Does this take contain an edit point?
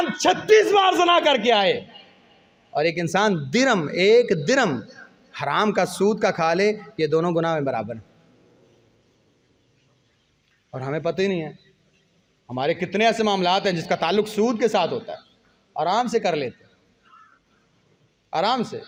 no; 0 cuts

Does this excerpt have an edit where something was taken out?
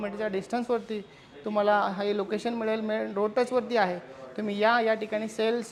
no; 0 cuts

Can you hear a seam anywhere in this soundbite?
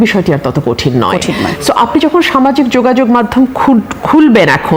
no; 0 cuts

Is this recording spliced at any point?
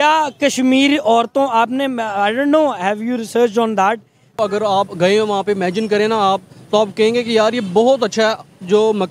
yes; 1 cut; at 4.4 s

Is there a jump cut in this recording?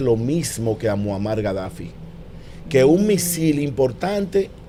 no; 0 cuts

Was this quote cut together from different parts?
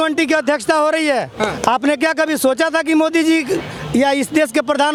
no; 0 cuts

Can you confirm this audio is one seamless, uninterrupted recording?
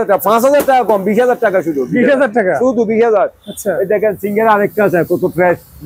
yes; 0 cuts

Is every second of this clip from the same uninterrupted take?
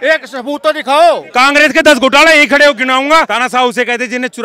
no; 2 cuts; at 1.2 s, 3.3 s

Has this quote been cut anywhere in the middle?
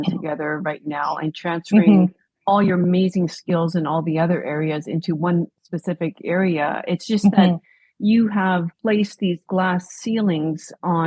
yes; 2 cuts; at 5.6 s, 8.7 s

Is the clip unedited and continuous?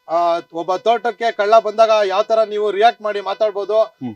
yes; 0 cuts

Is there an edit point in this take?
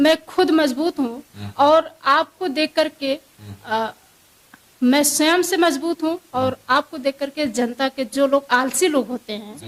no; 0 cuts

